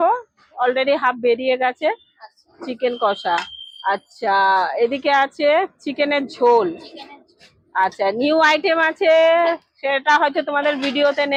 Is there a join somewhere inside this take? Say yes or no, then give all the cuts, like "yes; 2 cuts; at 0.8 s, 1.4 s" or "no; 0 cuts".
no; 0 cuts